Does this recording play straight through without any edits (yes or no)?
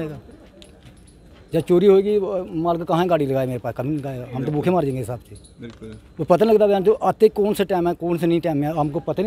yes